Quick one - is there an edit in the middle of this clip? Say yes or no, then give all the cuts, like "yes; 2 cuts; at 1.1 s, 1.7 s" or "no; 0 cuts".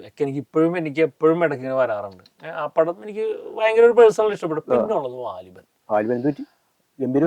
no; 0 cuts